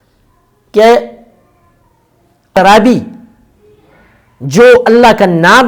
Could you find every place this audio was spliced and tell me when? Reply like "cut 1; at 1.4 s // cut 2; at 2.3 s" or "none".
cut 1; at 2.5 s